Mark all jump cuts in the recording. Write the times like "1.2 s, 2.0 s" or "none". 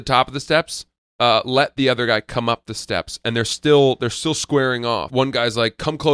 5.1 s